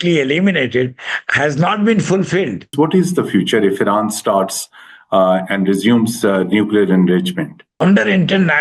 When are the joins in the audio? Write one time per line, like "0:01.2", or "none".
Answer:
0:02.7
0:07.8